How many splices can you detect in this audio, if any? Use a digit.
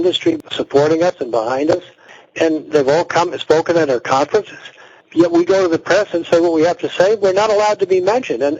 1